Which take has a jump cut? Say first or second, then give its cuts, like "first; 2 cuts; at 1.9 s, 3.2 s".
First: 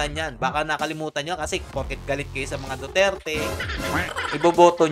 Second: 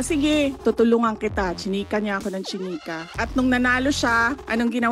second; 1 cut; at 3.0 s